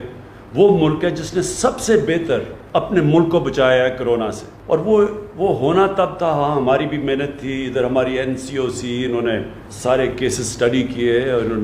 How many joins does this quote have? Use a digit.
3